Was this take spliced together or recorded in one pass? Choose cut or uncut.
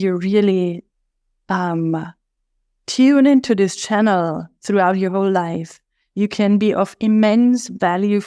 uncut